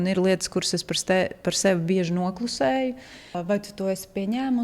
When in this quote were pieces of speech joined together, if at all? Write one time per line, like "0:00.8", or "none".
0:03.4